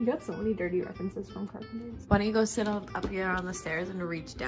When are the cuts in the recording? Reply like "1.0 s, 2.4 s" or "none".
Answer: none